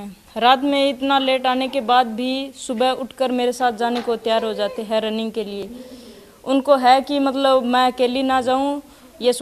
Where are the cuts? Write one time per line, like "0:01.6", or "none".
none